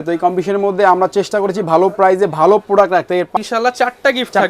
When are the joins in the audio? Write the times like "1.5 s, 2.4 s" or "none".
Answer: 3.3 s